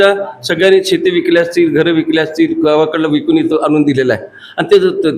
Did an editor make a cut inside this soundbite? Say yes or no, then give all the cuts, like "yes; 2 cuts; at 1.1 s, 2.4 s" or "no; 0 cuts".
no; 0 cuts